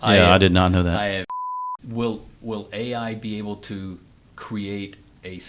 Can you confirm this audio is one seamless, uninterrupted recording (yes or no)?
no